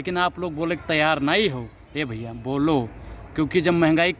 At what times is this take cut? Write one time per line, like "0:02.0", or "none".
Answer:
none